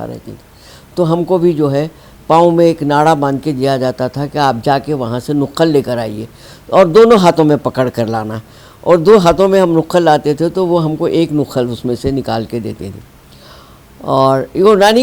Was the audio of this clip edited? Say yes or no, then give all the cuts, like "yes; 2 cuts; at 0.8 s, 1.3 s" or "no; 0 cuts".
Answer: no; 0 cuts